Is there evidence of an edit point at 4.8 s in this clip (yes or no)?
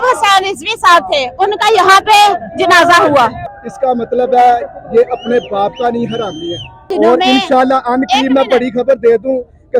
no